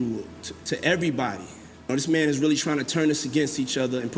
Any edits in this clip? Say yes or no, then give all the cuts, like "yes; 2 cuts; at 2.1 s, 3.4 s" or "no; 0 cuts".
yes; 1 cut; at 1.9 s